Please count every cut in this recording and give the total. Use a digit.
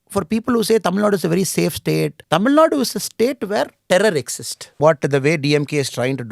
3